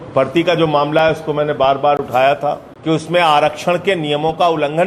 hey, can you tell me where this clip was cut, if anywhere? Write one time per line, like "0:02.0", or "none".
0:02.7